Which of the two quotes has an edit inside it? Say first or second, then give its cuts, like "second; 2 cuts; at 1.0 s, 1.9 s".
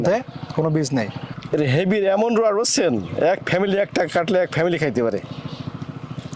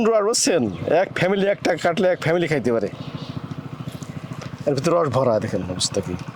first; 1 cut; at 1.4 s